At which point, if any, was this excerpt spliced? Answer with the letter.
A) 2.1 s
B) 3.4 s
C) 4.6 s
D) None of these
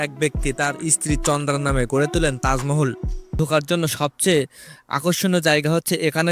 B